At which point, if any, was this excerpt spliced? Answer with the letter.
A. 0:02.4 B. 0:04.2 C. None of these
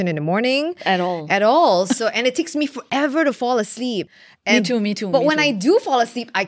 B